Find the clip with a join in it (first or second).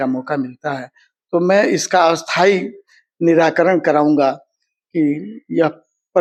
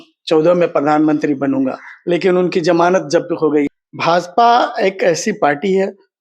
second